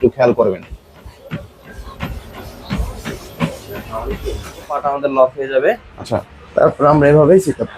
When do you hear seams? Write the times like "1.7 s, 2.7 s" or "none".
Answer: 4.8 s